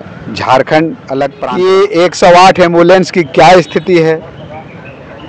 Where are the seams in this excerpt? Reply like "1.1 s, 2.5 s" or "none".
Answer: 1.4 s